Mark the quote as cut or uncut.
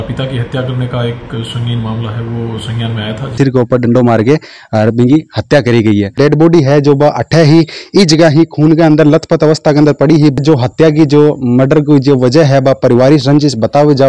cut